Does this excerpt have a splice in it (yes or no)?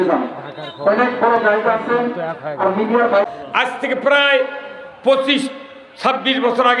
yes